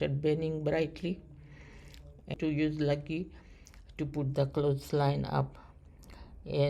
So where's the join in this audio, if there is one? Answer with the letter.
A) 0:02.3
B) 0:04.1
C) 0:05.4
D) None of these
A